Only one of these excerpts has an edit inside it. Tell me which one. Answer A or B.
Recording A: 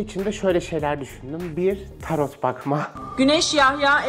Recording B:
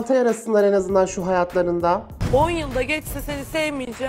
A